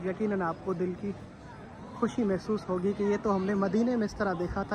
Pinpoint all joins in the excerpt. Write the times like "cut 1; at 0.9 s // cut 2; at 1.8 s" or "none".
none